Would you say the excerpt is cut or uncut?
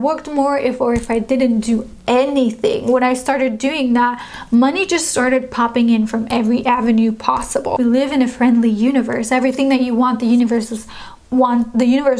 cut